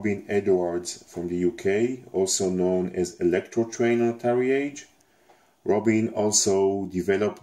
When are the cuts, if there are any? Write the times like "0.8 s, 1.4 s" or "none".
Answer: 3.3 s